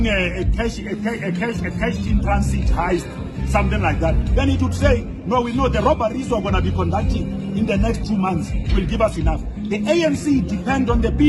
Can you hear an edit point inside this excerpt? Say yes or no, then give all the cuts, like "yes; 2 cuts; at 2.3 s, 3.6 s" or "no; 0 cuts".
no; 0 cuts